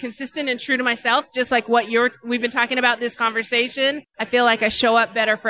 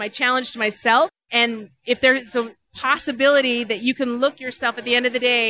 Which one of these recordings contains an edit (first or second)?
first